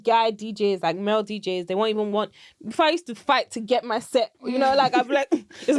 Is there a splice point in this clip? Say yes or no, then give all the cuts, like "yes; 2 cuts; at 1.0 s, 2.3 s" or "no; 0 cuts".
no; 0 cuts